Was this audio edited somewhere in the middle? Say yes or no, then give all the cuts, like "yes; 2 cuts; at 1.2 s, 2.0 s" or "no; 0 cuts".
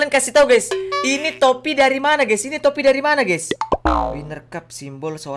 yes; 1 cut; at 4.2 s